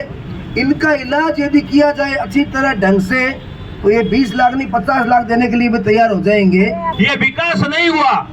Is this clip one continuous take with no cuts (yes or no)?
no